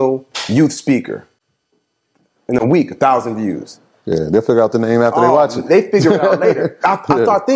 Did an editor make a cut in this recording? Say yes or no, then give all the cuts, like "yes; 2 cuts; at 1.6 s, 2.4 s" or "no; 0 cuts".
no; 0 cuts